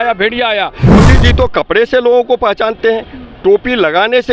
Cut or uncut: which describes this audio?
cut